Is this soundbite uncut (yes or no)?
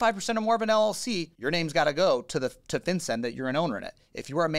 no